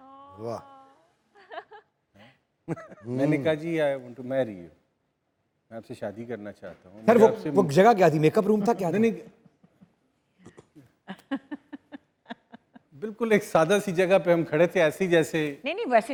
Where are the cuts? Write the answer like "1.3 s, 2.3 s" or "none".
none